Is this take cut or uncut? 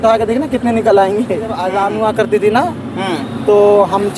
cut